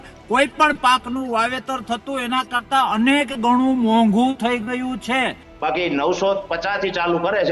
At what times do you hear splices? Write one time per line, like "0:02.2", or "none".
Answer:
0:05.4